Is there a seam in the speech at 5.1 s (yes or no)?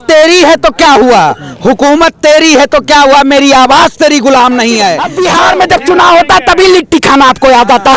yes